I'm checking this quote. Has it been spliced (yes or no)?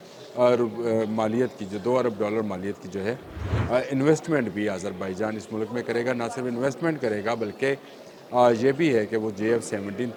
no